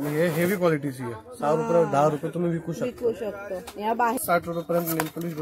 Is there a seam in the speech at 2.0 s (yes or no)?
no